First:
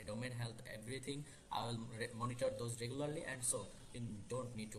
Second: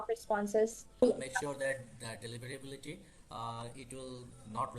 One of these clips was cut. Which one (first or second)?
second